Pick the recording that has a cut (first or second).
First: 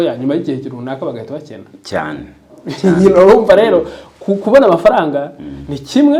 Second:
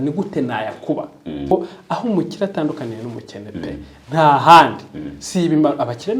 second